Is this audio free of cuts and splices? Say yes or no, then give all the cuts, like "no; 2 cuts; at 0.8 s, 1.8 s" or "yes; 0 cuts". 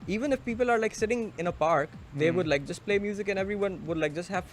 yes; 0 cuts